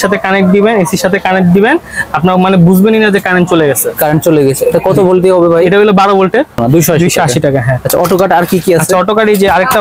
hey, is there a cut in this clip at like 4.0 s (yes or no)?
no